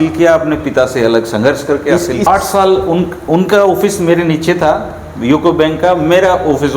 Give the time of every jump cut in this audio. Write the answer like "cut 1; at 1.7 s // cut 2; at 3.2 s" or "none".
cut 1; at 2.3 s